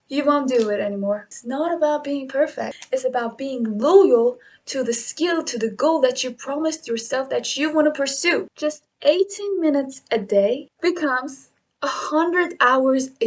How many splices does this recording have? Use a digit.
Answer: 4